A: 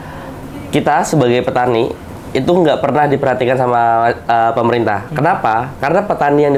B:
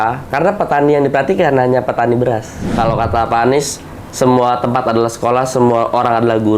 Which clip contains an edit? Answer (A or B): B